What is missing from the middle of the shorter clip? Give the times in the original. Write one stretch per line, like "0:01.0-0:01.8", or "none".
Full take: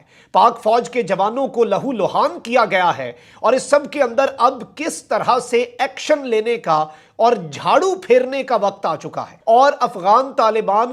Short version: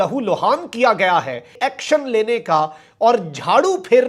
0:03.3-0:05.7